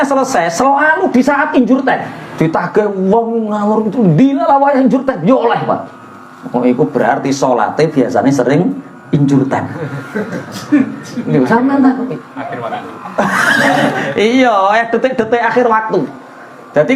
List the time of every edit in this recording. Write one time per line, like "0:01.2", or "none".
0:02.2